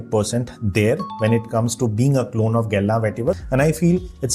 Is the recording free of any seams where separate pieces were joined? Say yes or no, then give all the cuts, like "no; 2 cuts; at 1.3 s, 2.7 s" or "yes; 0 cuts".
no; 1 cut; at 3.4 s